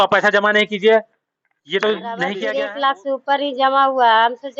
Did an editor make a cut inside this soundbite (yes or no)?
yes